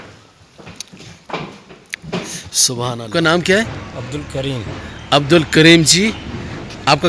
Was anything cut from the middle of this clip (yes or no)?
yes